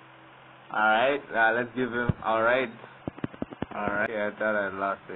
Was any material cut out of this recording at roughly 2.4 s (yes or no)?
no